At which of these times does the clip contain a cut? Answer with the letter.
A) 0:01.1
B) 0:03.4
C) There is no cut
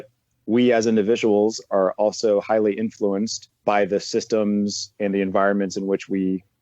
B